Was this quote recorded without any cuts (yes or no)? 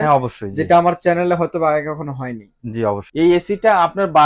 no